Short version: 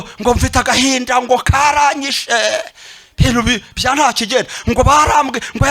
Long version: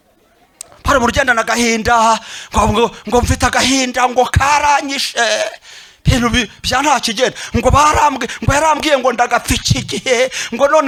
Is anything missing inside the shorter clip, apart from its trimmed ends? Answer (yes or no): no